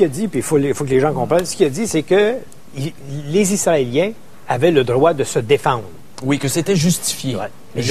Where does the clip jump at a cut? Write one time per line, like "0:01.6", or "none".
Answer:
0:03.1